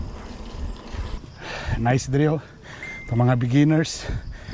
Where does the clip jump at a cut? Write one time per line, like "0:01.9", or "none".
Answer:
0:01.2